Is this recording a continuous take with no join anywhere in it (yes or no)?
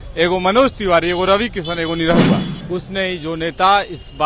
no